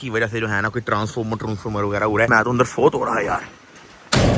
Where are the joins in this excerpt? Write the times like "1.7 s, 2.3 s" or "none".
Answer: 2.3 s